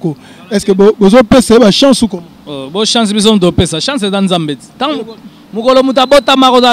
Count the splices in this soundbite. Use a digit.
0